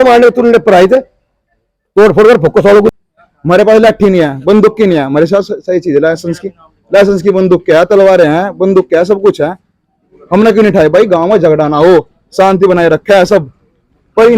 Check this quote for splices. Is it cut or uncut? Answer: cut